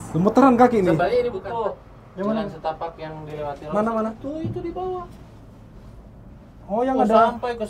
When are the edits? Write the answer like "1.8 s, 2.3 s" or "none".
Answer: 1.4 s

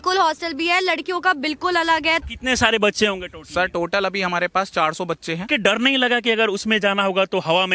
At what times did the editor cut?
2.2 s, 5.4 s

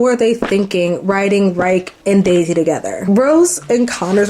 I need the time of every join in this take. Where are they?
2.9 s

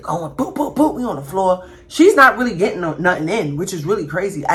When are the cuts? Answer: none

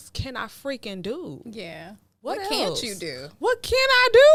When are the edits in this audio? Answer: none

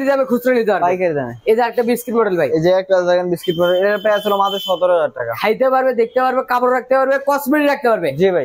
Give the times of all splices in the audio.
none

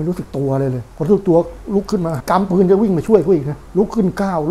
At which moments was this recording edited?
0.9 s, 2.2 s, 3.6 s

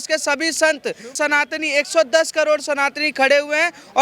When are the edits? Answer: 1.1 s

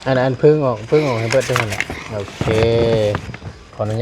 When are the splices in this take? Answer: none

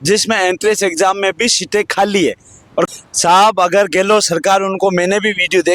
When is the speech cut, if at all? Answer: 2.9 s

